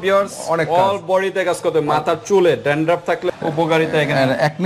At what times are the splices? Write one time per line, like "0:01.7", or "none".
0:03.2